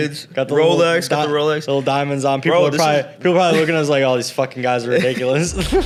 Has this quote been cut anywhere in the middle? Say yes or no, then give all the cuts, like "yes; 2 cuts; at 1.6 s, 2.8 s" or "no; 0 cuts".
no; 0 cuts